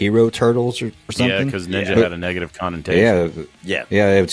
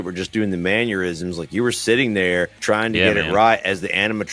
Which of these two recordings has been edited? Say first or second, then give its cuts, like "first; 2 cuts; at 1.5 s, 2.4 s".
second; 1 cut; at 2.6 s